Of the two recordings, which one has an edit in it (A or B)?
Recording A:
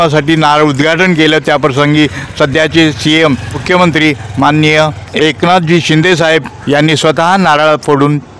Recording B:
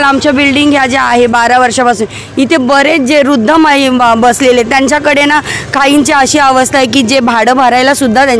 A